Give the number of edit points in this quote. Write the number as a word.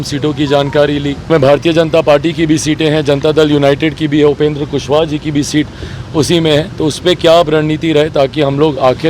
one